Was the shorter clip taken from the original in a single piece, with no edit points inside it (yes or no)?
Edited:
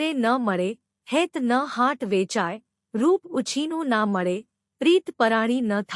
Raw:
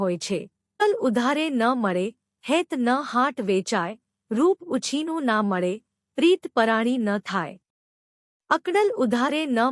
yes